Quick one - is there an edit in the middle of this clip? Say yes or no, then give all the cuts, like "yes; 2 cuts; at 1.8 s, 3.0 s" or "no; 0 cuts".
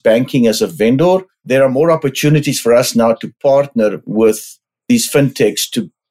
yes; 1 cut; at 1.3 s